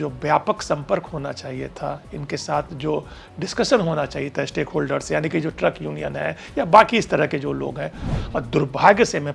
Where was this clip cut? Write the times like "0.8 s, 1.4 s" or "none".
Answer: 8.0 s